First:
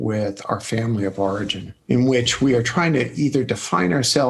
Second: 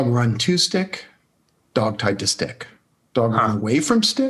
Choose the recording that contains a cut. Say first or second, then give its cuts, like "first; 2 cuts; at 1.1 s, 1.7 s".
first; 1 cut; at 1.7 s